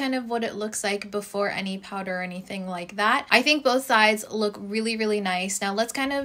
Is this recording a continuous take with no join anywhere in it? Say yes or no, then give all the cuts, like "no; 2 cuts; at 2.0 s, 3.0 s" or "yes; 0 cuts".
yes; 0 cuts